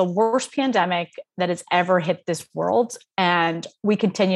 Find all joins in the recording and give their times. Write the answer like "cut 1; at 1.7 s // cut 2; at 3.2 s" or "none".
none

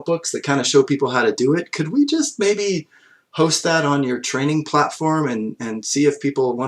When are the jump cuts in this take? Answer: none

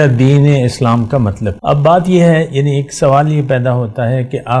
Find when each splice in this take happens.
cut 1; at 1.5 s

